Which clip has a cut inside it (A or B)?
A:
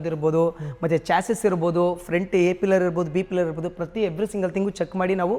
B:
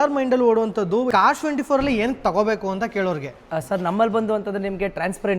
B